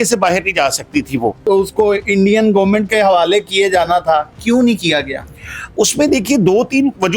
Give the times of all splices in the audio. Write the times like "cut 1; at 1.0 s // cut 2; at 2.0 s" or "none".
cut 1; at 1.5 s

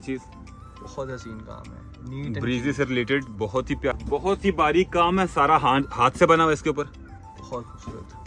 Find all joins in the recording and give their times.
cut 1; at 3.9 s

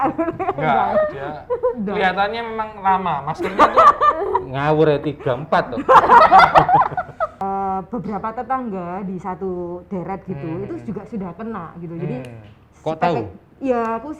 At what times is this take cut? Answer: cut 1; at 7.3 s

